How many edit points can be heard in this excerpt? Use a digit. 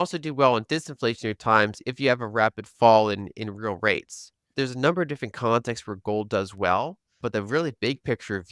2